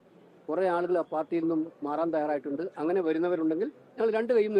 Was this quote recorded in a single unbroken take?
yes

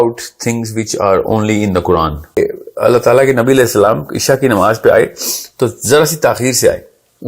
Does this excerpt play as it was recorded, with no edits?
no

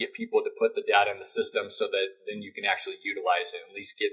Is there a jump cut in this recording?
no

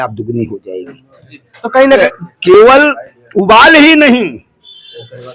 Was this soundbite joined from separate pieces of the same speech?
yes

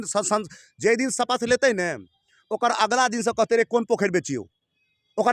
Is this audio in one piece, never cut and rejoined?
yes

